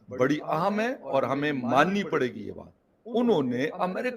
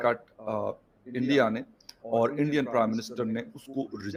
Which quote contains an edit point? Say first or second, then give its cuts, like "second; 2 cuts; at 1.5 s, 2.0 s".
first; 1 cut; at 2.9 s